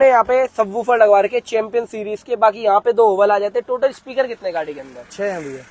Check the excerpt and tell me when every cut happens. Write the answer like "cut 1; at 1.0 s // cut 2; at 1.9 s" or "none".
none